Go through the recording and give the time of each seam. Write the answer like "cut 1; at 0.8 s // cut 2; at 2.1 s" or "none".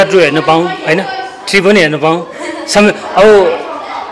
none